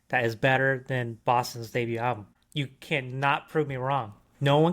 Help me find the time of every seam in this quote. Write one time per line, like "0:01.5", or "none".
0:02.4